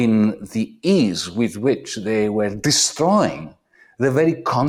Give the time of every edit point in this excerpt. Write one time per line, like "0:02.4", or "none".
none